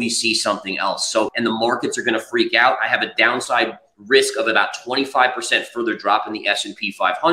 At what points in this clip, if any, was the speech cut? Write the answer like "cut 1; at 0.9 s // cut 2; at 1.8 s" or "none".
cut 1; at 1.3 s